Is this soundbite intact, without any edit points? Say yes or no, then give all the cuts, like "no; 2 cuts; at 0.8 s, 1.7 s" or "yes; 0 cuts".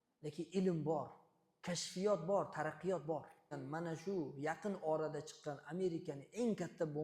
no; 1 cut; at 3.6 s